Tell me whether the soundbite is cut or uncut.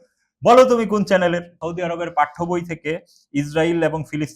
cut